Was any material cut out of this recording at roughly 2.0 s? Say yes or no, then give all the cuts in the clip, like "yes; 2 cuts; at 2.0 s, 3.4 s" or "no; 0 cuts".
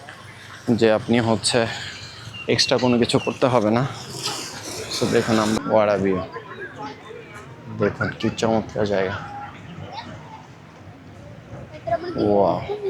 no; 1 cut; at 5.6 s